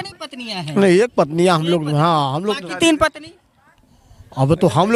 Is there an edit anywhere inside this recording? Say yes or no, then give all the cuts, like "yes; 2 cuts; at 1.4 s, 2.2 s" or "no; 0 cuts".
no; 0 cuts